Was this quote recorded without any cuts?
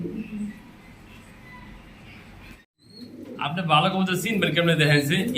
no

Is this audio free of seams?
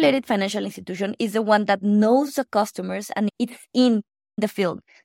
yes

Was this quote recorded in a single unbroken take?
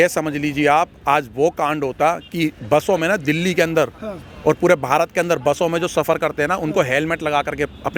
yes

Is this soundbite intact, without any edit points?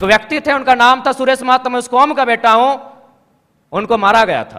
yes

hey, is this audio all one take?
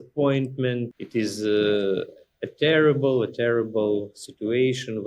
no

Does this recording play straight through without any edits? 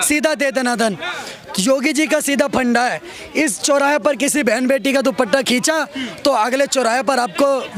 yes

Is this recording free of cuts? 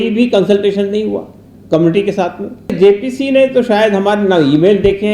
no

